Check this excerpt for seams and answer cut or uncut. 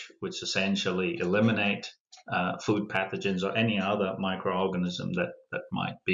uncut